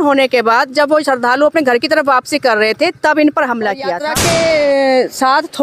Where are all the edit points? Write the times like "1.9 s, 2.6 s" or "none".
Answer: 4.0 s